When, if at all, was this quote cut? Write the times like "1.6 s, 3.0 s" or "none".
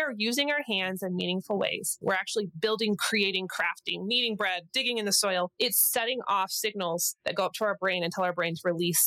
2.0 s, 4.7 s